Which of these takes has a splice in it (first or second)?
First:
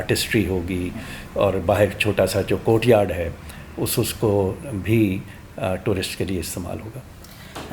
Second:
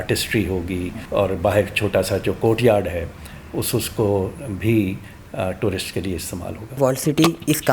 second